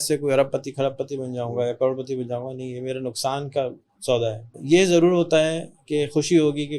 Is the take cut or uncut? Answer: cut